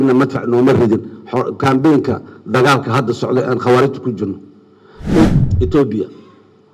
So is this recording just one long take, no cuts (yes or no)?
no